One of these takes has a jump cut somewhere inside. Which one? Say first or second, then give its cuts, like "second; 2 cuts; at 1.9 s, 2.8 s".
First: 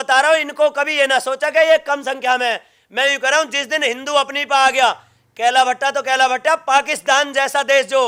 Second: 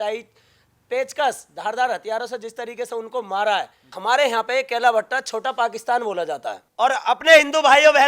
second; 2 cuts; at 3.8 s, 6.6 s